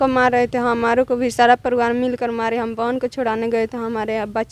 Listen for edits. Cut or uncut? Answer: uncut